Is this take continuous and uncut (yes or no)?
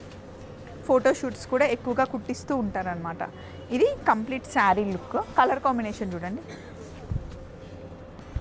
yes